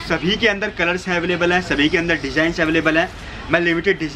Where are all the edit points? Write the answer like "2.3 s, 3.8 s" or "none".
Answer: none